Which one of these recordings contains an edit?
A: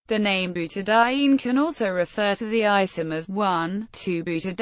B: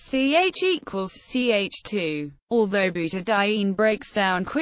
A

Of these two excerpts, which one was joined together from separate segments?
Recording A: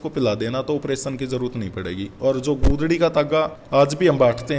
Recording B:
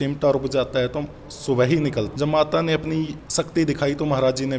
B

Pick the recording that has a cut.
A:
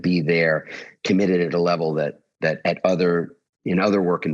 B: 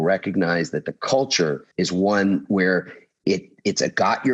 B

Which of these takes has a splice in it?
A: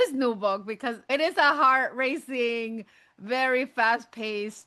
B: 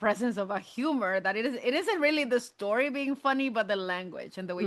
A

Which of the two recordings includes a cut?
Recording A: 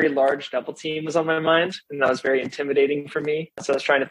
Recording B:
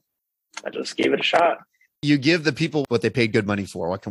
B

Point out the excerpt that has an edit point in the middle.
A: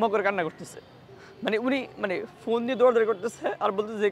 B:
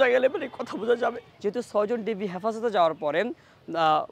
B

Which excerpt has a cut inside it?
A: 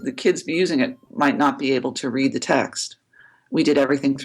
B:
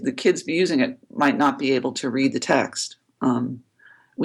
A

